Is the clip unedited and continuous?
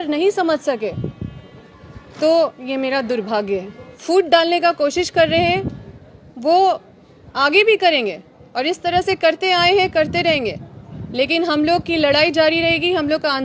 no; 1 cut; at 3.9 s

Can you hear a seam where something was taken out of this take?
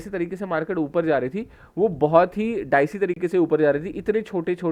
no; 0 cuts

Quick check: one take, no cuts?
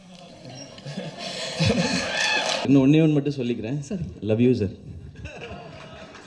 no; 1 cut; at 2.7 s

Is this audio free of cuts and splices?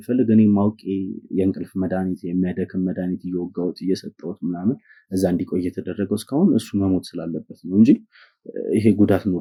yes; 0 cuts

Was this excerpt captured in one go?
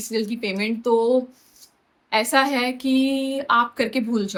yes; 0 cuts

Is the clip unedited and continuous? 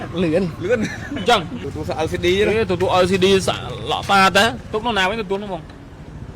no; 1 cut; at 4.6 s

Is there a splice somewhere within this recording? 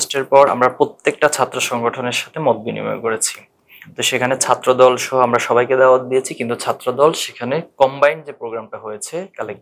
no; 0 cuts

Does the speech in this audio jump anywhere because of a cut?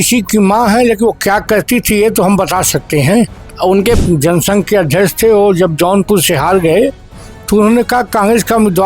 yes; 1 cut; at 4.0 s

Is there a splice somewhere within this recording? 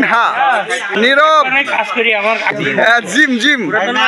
yes; 2 cuts; at 1.0 s, 2.6 s

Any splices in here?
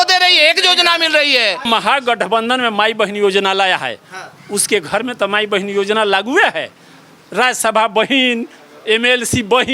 yes; 1 cut; at 1.7 s

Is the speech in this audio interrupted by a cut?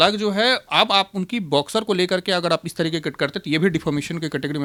no; 0 cuts

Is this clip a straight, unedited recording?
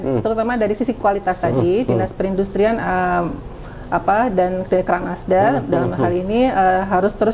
yes; 0 cuts

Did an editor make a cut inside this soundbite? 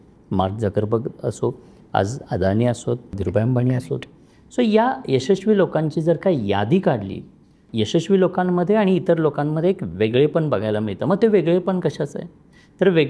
yes; 2 cuts; at 3.2 s, 7.6 s

